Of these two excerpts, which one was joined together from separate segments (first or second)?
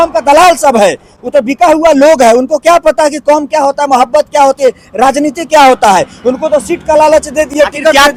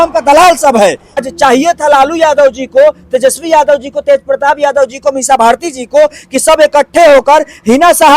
second